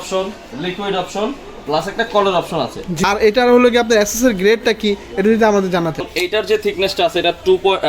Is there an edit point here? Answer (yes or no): yes